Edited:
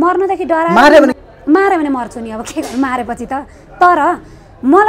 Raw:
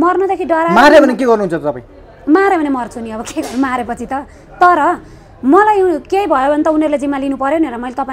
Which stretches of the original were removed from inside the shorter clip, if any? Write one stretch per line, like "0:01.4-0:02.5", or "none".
0:01.2-0:02.0